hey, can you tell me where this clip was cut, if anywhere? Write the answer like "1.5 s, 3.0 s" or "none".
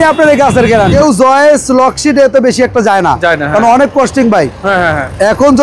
0.9 s